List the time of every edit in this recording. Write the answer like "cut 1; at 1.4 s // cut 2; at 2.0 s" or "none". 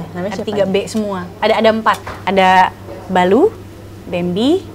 cut 1; at 1.2 s // cut 2; at 2.1 s